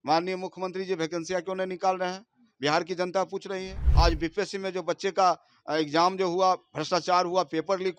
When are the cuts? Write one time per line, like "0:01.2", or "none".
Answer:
0:03.8